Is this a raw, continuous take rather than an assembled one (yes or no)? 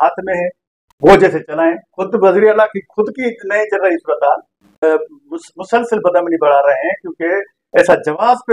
no